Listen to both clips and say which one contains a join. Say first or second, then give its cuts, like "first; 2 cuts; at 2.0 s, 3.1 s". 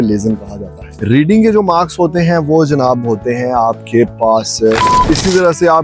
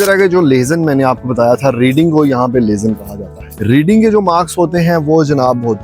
first; 1 cut; at 4.8 s